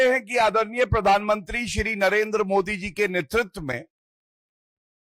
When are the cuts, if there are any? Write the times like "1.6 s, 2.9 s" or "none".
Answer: none